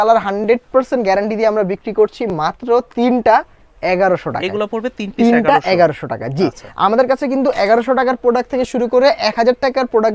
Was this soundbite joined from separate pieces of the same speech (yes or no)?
no